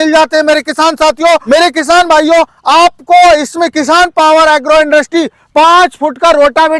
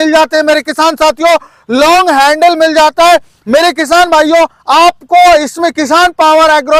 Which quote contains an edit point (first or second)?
first